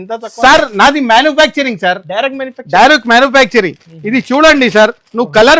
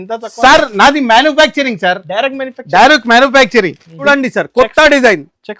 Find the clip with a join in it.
second; 1 cut; at 3.9 s

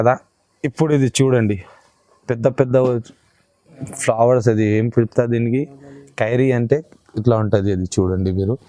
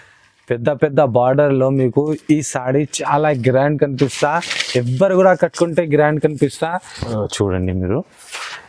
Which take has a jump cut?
second; 1 cut; at 7.0 s

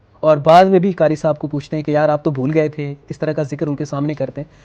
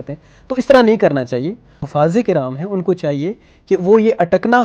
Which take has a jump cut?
second; 1 cut; at 1.9 s

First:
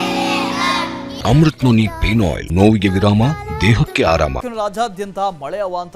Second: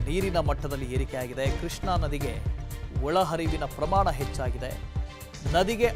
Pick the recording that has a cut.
first; 3 cuts; at 1.1 s, 2.4 s, 4.4 s

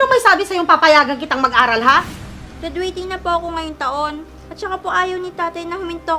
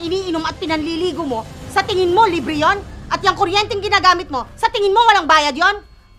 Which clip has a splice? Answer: first; 1 cut; at 2.2 s

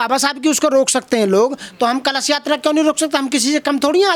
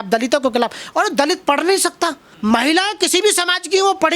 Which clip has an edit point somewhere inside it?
second; 1 cut; at 2.3 s

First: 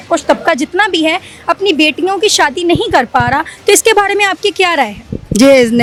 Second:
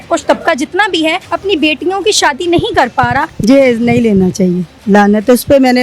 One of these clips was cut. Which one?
second; 2 cuts; at 1.3 s, 3.3 s

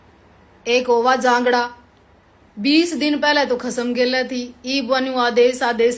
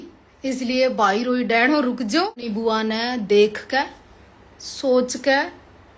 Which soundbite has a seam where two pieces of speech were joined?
second; 1 cut; at 2.5 s

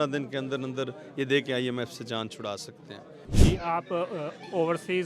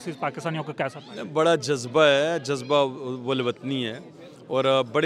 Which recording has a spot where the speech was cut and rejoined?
first; 1 cut; at 3.5 s

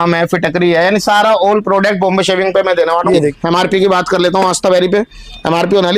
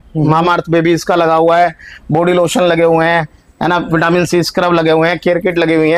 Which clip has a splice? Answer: first; 1 cut; at 3.4 s

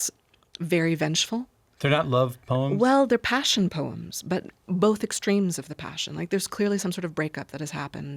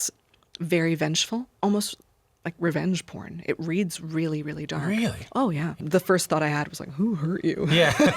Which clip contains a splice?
second; 2 cuts; at 1.5 s, 5.8 s

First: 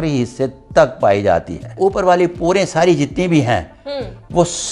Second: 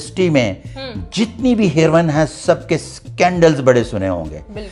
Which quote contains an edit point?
first; 1 cut; at 1.7 s

